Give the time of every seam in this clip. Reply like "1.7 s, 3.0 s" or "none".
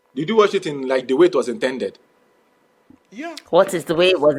none